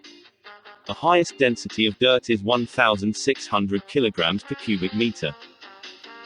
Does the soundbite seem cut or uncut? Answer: cut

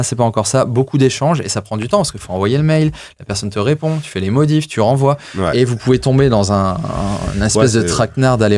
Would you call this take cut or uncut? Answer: uncut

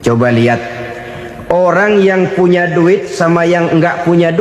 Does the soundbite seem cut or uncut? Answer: uncut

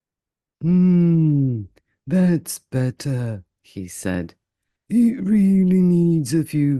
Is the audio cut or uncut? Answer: uncut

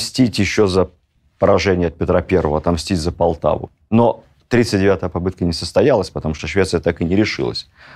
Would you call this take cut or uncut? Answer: uncut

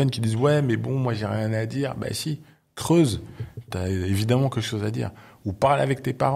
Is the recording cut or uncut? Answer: cut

